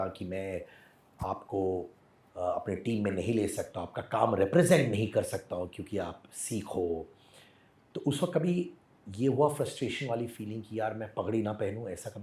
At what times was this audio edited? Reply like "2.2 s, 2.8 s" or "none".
none